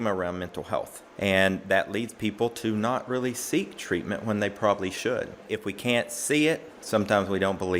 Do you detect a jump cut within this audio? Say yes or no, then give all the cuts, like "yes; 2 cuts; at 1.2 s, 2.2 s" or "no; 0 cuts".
yes; 2 cuts; at 1.0 s, 5.5 s